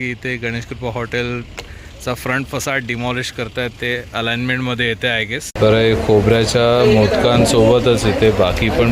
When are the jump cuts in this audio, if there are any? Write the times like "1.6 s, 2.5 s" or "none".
5.4 s

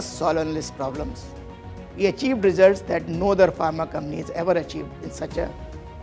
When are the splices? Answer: 1.5 s

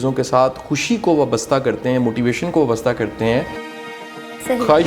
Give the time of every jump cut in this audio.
3.8 s

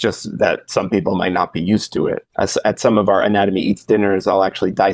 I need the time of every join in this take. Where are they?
2.2 s

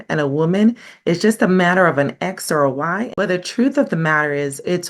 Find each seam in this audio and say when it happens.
3.0 s

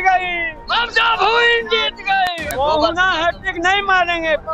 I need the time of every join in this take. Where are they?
2.4 s

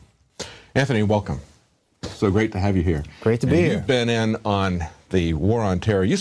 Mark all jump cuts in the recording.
3.9 s

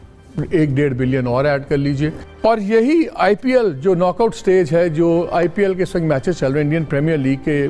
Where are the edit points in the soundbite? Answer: 2.2 s

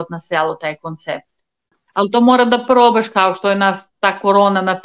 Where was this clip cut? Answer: 1.8 s

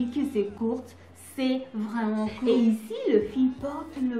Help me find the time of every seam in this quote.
2.4 s

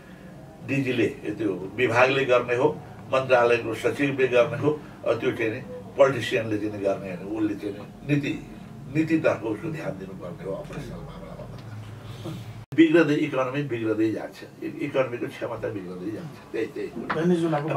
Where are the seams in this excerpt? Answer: 12.6 s

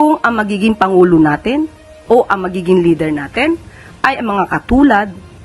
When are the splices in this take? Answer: none

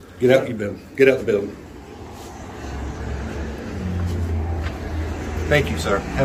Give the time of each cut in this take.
none

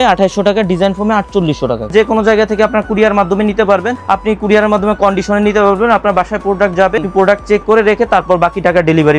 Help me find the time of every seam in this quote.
1.9 s, 3.9 s, 7.1 s

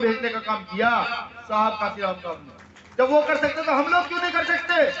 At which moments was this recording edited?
none

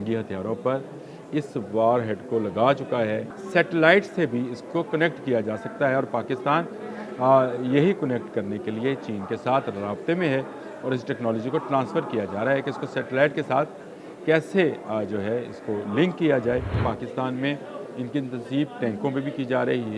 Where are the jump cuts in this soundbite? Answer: 3.3 s, 16.8 s

